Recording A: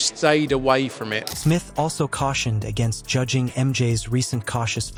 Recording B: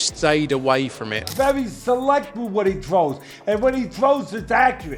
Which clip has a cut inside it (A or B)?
B